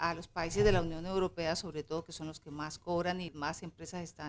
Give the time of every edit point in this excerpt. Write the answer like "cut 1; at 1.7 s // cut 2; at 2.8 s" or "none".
cut 1; at 3.3 s